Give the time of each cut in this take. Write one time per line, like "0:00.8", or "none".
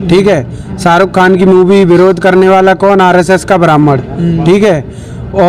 none